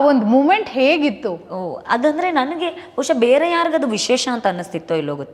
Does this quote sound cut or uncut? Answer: uncut